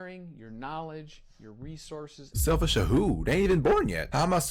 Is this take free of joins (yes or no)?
no